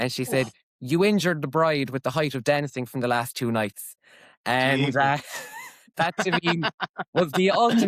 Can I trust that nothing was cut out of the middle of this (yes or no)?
yes